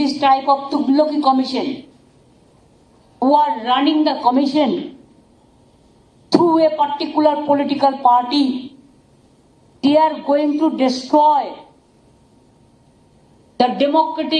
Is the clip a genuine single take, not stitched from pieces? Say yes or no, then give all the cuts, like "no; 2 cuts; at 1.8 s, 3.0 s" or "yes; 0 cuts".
yes; 0 cuts